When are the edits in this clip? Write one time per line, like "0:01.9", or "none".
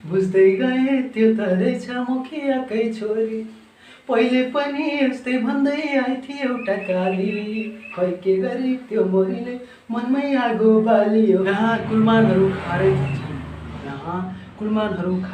0:11.4